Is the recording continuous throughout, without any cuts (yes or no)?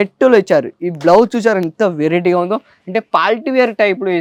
yes